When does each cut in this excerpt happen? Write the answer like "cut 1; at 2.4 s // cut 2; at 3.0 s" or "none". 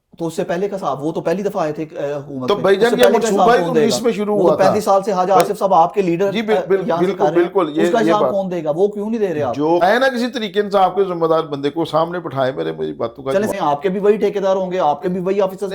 cut 1; at 9.8 s // cut 2; at 13.5 s